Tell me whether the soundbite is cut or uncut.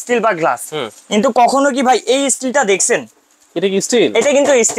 uncut